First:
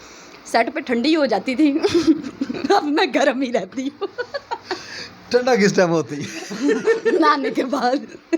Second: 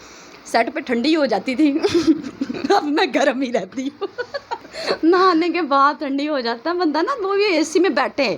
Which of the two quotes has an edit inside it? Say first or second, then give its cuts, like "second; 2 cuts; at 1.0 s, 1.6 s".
second; 1 cut; at 4.6 s